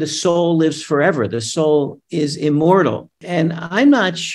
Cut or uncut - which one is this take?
cut